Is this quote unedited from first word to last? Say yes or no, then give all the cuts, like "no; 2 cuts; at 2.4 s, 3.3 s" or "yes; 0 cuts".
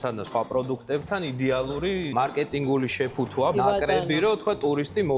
no; 2 cuts; at 2.1 s, 3.6 s